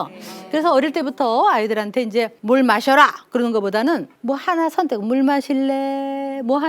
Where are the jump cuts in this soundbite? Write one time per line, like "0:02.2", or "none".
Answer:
0:02.4
0:04.1